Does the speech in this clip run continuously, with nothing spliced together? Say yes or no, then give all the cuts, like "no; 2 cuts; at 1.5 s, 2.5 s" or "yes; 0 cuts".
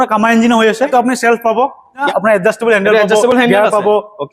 no; 2 cuts; at 0.9 s, 2.1 s